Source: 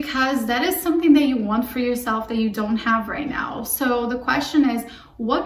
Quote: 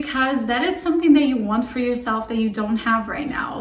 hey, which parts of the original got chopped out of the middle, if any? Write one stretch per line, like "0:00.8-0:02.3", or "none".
none